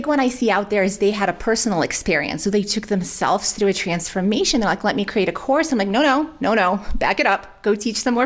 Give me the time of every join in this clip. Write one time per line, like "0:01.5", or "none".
none